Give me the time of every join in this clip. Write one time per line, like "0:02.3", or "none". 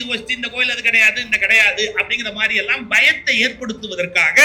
none